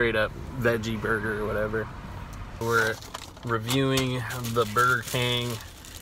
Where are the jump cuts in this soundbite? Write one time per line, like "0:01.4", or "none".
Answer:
0:02.6